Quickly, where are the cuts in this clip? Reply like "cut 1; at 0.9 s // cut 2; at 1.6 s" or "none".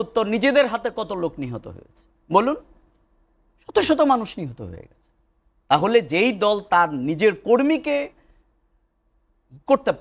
none

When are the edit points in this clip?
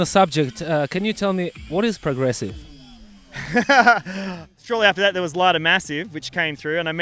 cut 1; at 4.5 s

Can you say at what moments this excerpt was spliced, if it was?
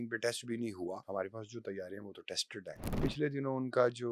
cut 1; at 1.0 s // cut 2; at 3.0 s

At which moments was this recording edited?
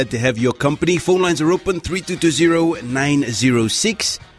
none

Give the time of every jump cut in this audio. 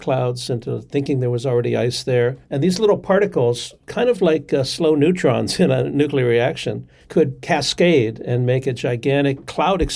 none

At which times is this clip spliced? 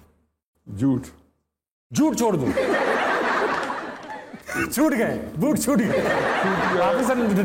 cut 1; at 4.4 s

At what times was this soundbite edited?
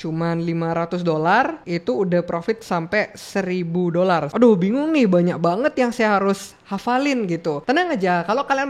cut 1; at 4.3 s

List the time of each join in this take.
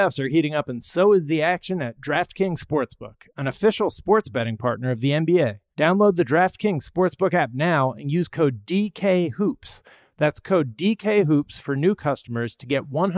cut 1; at 5.6 s

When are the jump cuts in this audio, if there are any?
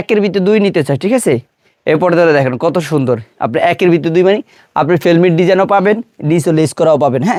none

